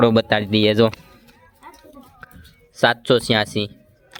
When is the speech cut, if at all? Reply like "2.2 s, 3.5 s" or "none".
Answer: none